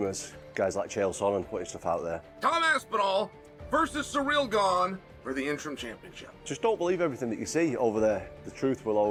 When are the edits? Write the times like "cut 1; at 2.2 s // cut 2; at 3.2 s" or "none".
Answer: none